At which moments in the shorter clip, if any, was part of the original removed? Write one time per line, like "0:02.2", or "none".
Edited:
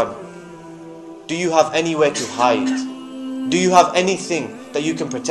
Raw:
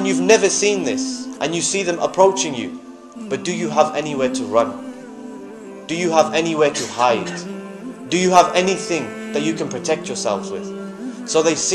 none

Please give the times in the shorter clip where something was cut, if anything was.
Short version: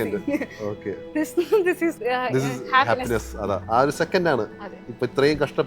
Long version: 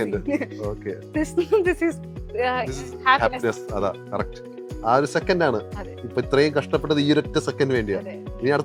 0:02.0
0:03.6

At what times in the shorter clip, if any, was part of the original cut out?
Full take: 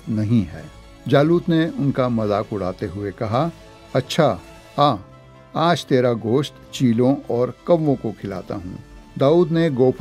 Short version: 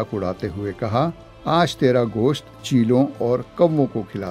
0:01.3

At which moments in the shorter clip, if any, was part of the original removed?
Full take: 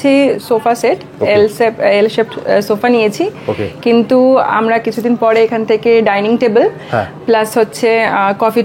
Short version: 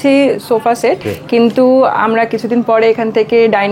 0:01.1

